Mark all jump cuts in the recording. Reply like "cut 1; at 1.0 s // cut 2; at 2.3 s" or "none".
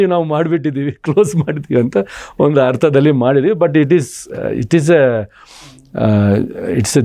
none

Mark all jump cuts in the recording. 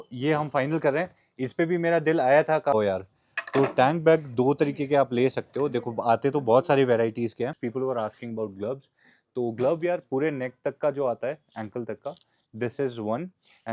cut 1; at 2.7 s // cut 2; at 7.6 s

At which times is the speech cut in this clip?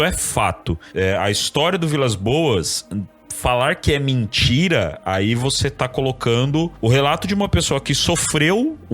cut 1; at 0.8 s // cut 2; at 6.7 s

